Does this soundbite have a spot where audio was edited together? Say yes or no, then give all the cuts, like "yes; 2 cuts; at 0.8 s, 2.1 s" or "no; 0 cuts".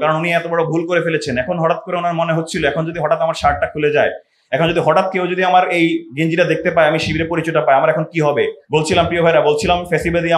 yes; 1 cut; at 8.6 s